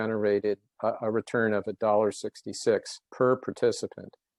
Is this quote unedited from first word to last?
yes; 0 cuts

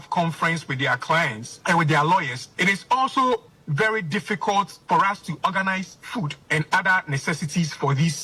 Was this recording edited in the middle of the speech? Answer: yes; 3 cuts; at 1.5 s, 4.8 s, 6.4 s

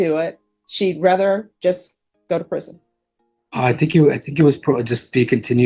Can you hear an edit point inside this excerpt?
no; 0 cuts

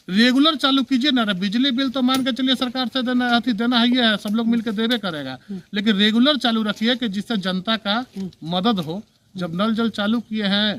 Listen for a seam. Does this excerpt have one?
no; 0 cuts

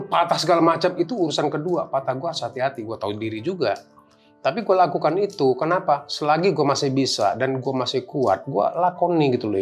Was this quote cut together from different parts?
no; 0 cuts

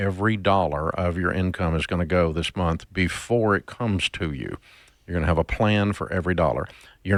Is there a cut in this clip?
no; 0 cuts

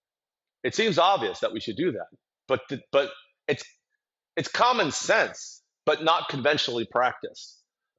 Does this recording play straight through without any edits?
yes; 0 cuts

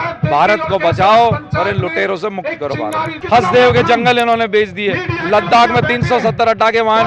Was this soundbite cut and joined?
yes; 1 cut; at 3.2 s

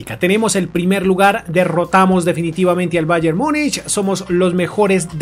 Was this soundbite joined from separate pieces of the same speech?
no; 0 cuts

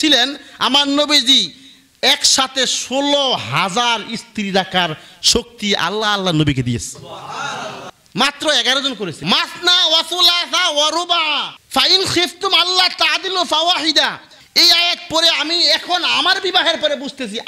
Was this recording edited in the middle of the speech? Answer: yes; 2 cuts; at 7.9 s, 9.2 s

